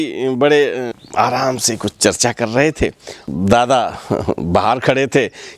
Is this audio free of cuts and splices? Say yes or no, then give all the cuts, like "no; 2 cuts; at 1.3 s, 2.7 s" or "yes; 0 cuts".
no; 2 cuts; at 0.9 s, 3.3 s